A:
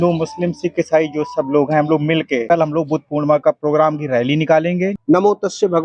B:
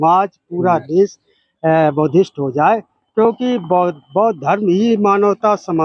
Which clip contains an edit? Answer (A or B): A